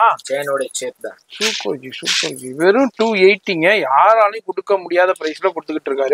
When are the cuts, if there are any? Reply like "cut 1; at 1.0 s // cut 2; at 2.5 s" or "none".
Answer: none